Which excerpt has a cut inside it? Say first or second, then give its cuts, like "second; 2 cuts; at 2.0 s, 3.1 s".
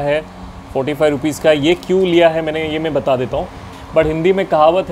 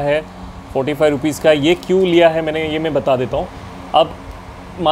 first; 1 cut; at 3.7 s